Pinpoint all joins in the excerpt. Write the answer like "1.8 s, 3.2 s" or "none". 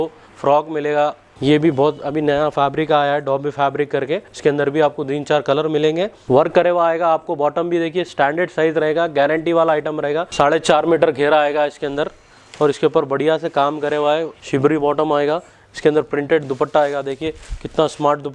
1.3 s, 4.3 s, 6.2 s, 10.3 s, 14.3 s

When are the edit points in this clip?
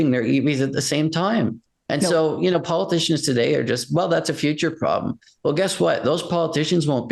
none

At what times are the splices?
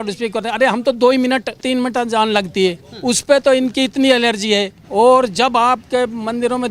1.6 s, 4.8 s

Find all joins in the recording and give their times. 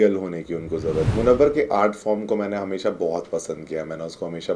1.1 s

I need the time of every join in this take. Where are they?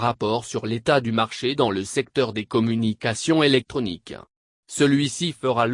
none

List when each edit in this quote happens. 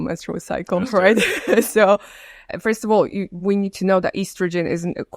2.5 s

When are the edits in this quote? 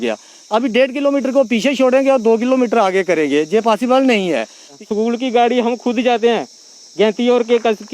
4.7 s

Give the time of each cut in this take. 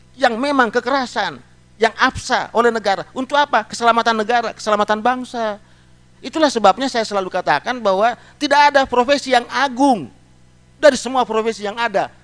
6.1 s

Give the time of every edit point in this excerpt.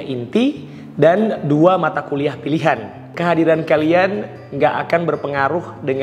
3.1 s

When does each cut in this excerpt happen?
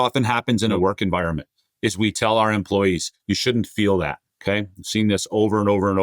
0.7 s, 2.2 s, 4.3 s

